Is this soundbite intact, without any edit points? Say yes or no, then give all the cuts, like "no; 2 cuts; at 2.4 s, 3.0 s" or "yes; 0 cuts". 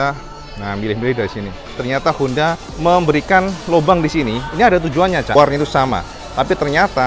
no; 3 cuts; at 1.7 s, 2.7 s, 5.3 s